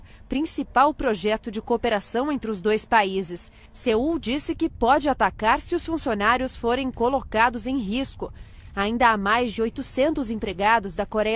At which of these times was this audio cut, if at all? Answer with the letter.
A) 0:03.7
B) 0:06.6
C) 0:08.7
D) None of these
C